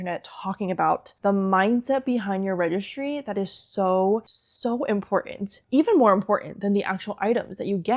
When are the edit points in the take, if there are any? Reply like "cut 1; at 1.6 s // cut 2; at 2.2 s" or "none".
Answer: none